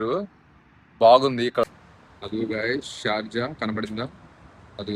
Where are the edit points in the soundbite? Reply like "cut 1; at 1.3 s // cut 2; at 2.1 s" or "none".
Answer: cut 1; at 1.7 s